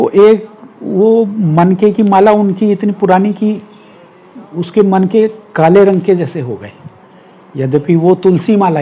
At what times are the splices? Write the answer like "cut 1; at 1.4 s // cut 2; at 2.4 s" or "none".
none